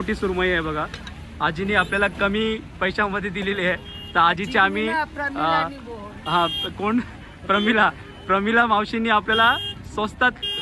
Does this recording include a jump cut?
no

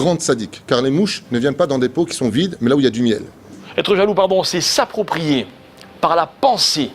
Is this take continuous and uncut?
no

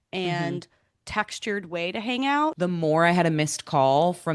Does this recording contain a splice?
yes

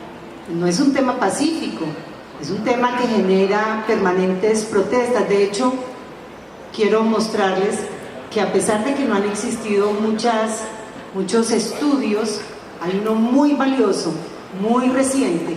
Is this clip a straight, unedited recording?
yes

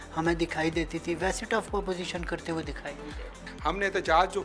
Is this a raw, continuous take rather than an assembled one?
no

